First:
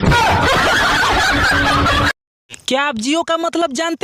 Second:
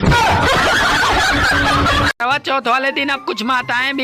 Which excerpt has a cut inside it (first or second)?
second